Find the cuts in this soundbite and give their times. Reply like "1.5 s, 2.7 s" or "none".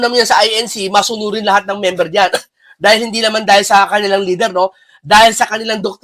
2.4 s